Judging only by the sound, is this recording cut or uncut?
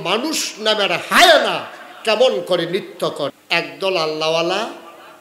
cut